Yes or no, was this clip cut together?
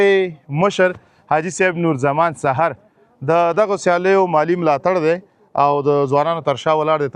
no